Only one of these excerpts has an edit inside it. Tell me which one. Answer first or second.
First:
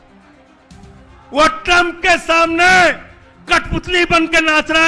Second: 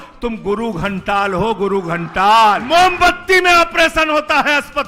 second